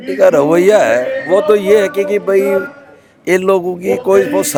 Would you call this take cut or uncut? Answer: uncut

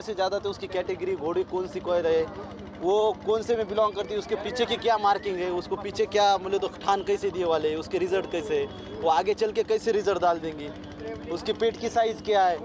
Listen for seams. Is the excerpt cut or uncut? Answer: uncut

